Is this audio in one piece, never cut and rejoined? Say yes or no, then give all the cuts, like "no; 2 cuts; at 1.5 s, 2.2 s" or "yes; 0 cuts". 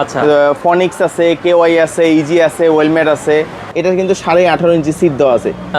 no; 1 cut; at 3.7 s